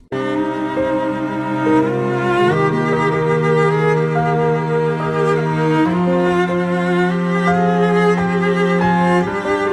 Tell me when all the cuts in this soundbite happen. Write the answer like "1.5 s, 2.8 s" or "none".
7.3 s

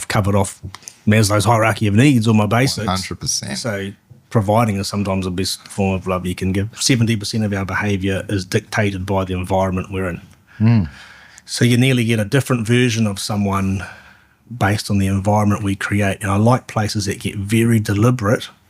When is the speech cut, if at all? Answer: 6.8 s

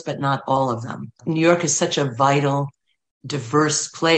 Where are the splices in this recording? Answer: 1.1 s

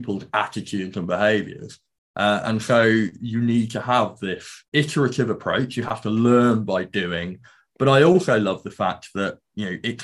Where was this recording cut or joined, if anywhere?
none

